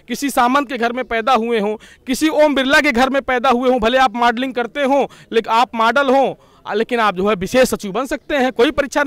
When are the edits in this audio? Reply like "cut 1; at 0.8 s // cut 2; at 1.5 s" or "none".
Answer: none